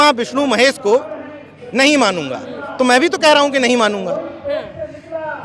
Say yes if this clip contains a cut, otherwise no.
yes